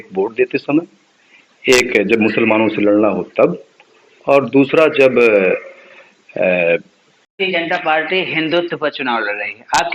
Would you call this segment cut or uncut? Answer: cut